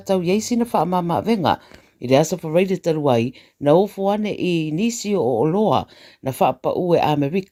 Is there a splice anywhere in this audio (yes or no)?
no